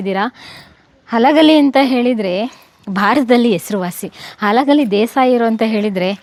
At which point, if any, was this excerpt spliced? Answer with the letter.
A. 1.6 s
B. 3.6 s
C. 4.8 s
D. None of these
D